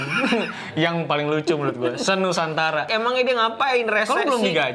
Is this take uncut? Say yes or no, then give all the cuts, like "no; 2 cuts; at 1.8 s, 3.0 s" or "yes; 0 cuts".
no; 1 cut; at 2.9 s